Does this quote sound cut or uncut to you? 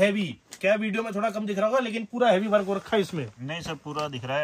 uncut